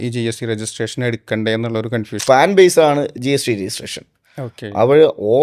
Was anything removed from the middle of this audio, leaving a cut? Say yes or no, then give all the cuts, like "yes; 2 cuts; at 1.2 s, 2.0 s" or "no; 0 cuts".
yes; 1 cut; at 2.2 s